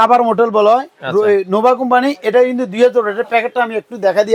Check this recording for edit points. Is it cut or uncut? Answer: uncut